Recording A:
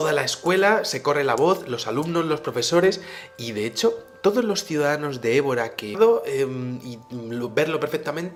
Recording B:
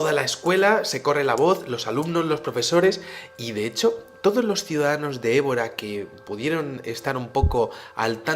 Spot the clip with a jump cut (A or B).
B